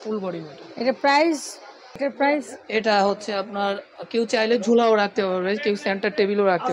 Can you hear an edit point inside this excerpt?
yes; 1 cut; at 2.0 s

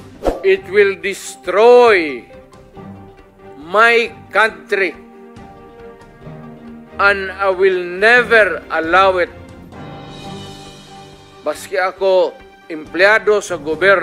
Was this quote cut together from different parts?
yes; 2 cuts; at 5.0 s, 7.0 s

